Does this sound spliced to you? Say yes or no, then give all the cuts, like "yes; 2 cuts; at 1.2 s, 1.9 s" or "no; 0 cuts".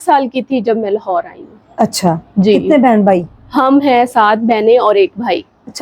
no; 0 cuts